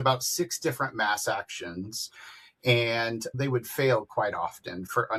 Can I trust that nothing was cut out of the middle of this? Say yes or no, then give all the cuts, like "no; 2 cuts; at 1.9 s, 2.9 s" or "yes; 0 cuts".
yes; 0 cuts